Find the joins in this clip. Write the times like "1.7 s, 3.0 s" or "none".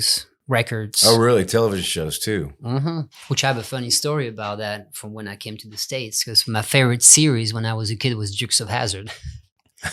3.1 s